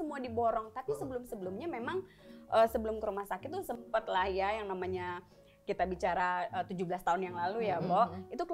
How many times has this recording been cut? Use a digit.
0